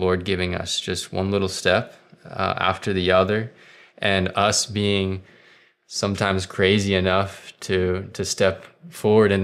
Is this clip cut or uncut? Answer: uncut